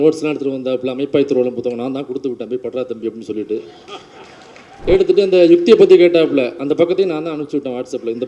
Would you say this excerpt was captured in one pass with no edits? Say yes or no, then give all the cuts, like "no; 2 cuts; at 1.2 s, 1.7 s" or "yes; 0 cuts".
yes; 0 cuts